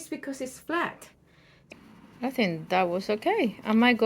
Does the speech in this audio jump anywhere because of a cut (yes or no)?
yes